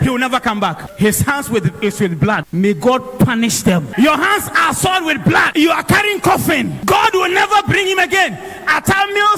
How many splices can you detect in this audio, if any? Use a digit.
5